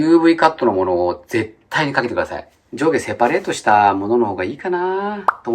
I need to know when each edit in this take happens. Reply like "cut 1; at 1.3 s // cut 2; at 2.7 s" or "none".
cut 1; at 2.8 s